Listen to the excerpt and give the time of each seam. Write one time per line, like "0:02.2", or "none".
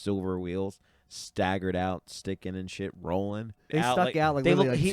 0:03.6